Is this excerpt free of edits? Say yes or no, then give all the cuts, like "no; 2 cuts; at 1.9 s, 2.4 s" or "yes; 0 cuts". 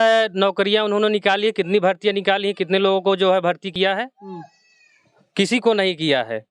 yes; 0 cuts